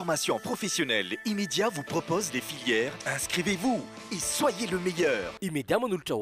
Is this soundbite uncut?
yes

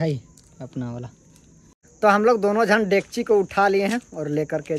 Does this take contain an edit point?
yes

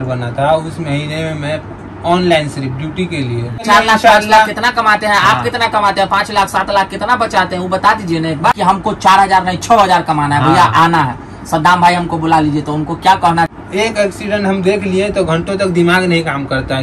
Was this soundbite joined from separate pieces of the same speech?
yes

